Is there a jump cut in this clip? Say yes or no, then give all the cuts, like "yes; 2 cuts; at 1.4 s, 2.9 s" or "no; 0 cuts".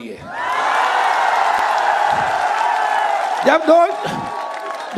no; 0 cuts